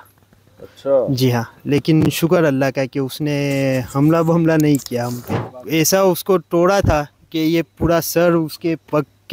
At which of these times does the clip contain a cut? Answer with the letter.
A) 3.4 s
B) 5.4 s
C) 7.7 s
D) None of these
B